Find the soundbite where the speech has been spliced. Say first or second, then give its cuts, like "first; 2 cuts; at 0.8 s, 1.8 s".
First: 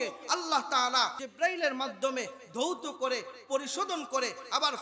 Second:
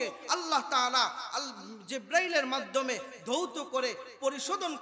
first; 1 cut; at 1.2 s